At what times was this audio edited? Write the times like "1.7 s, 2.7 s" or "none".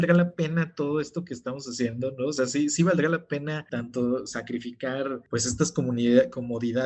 3.6 s, 5.2 s